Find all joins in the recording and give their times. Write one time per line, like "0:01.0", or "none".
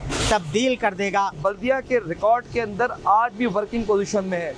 none